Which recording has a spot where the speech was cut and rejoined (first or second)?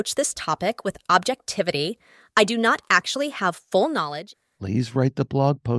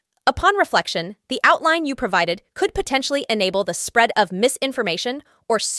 first